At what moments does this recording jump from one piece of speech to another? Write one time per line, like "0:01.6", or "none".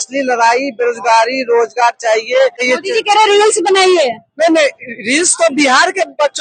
0:02.6